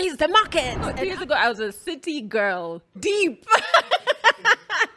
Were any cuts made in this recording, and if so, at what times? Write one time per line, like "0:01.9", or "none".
0:00.9
0:02.8